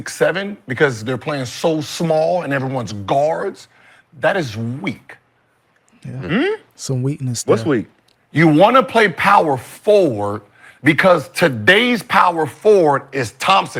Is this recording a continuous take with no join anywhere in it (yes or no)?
yes